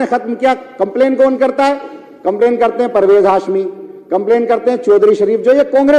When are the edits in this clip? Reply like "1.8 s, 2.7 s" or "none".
none